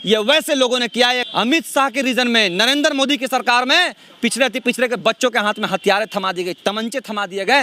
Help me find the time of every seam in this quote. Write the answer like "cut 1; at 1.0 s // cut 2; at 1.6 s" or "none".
cut 1; at 1.2 s